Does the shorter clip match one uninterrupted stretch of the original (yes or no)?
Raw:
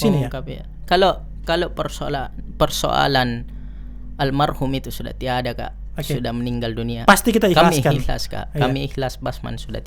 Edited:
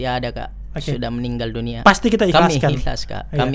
yes